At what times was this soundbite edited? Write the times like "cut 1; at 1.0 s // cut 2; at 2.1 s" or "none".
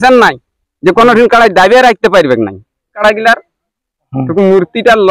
cut 1; at 3.0 s